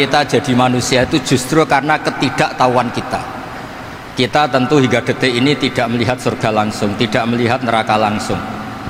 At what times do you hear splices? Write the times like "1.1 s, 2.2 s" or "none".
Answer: none

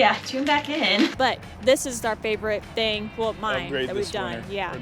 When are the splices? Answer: 1.1 s

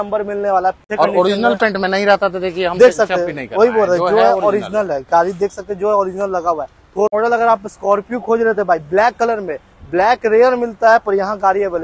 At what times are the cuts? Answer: 0.8 s, 7.1 s

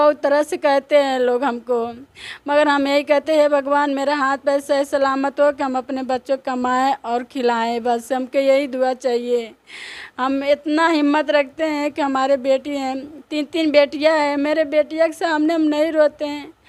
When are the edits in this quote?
none

